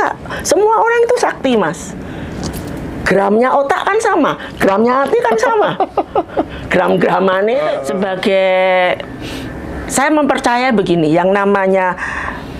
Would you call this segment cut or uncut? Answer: cut